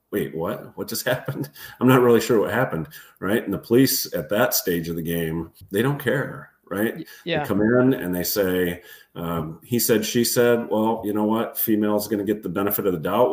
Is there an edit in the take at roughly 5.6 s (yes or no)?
yes